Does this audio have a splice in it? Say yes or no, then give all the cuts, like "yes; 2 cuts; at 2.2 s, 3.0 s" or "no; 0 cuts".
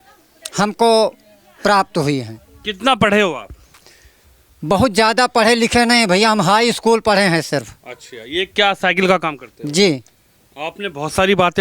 no; 0 cuts